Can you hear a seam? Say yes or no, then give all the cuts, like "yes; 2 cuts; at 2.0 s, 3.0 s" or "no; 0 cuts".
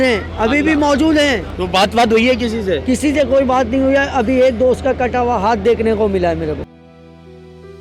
no; 0 cuts